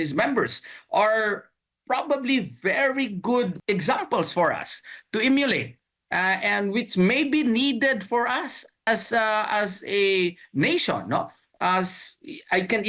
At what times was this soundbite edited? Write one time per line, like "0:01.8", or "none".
0:03.6
0:08.9